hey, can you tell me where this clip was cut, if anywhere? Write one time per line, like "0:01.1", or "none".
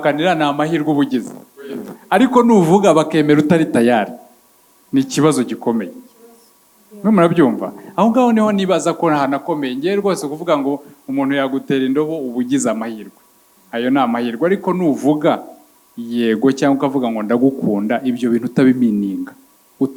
none